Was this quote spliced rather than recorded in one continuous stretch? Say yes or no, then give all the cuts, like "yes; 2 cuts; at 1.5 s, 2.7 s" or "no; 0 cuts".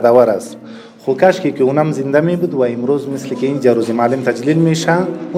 no; 0 cuts